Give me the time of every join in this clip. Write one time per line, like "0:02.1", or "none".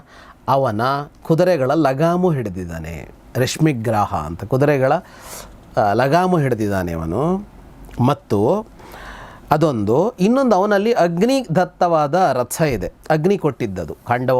none